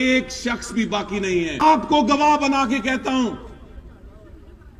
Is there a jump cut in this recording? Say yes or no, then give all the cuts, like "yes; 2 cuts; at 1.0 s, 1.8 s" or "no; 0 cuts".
yes; 1 cut; at 1.6 s